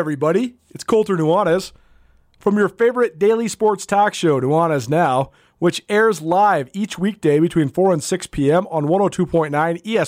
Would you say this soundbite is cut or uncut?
uncut